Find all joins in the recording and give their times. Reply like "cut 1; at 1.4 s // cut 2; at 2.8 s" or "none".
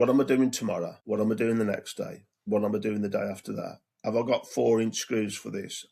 cut 1; at 0.9 s